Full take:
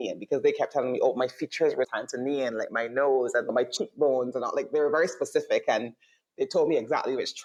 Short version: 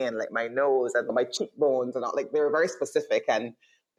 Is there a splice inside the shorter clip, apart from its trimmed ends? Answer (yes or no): no